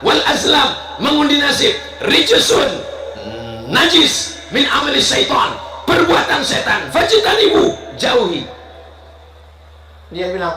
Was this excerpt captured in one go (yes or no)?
yes